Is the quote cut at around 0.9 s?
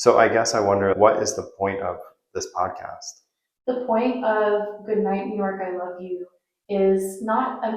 yes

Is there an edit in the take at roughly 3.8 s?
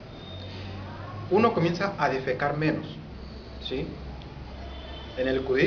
yes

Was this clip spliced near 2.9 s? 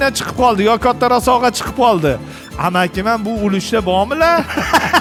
no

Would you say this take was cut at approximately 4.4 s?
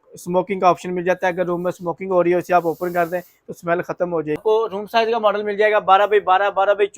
yes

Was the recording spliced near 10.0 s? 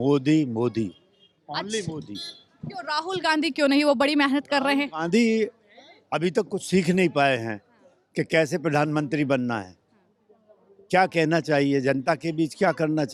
no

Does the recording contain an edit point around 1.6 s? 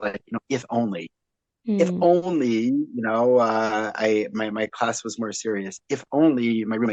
no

